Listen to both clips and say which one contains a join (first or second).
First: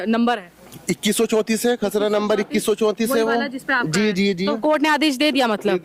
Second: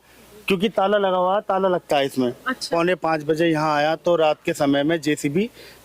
second